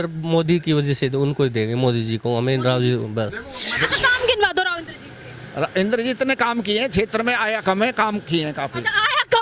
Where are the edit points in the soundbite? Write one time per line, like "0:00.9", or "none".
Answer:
0:03.8